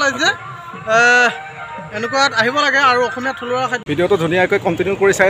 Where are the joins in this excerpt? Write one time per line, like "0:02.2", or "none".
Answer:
0:03.8